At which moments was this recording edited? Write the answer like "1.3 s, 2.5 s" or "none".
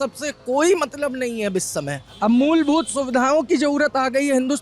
2.1 s